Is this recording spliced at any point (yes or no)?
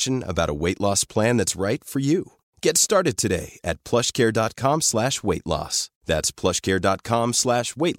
no